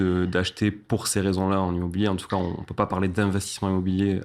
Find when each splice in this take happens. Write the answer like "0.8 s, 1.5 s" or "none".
none